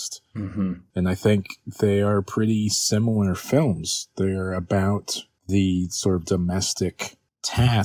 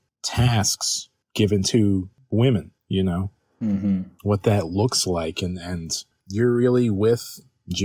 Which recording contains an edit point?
second; 2 cuts; at 2.5 s, 6.1 s

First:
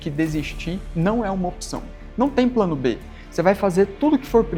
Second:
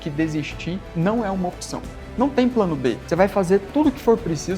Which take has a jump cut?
second; 1 cut; at 3.0 s

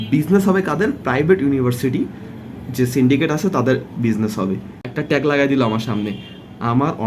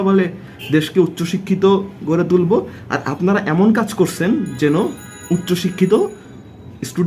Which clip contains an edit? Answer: first; 1 cut; at 4.8 s

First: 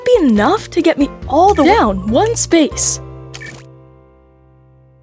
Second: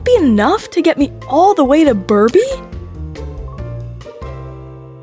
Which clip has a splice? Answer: first; 2 cuts; at 1.6 s, 2.7 s

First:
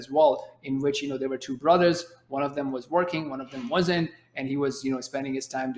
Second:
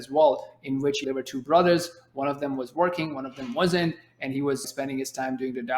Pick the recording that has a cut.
second; 2 cuts; at 1.0 s, 4.6 s

